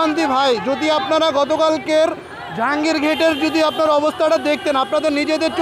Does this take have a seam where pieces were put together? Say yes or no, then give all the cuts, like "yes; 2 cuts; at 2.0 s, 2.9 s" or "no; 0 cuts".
no; 0 cuts